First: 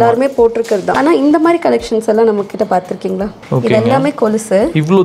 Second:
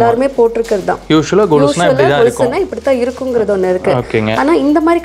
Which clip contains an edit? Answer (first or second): first